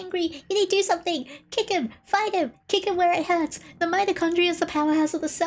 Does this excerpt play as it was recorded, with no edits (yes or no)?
yes